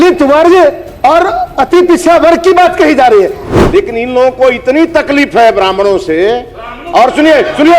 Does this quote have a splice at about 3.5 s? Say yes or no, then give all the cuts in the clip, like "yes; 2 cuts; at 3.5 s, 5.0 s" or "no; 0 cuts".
yes; 1 cut; at 3.5 s